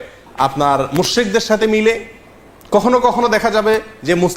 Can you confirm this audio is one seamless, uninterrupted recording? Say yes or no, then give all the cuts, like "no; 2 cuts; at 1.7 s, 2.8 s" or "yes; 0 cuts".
yes; 0 cuts